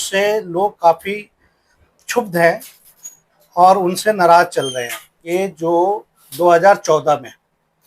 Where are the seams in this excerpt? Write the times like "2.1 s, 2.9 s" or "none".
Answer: 5.1 s